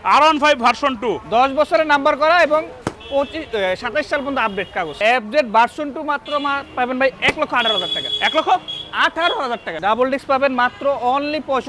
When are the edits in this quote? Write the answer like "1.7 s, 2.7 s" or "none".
4.9 s, 9.7 s